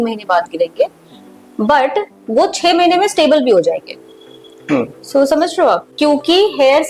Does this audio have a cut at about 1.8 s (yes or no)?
no